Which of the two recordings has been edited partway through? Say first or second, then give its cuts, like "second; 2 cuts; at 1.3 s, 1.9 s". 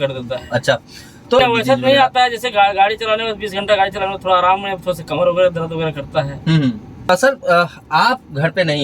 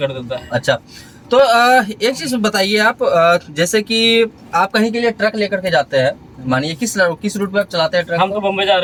first; 2 cuts; at 1.4 s, 7.1 s